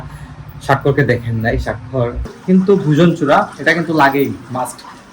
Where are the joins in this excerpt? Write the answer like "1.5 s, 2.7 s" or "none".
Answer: 2.3 s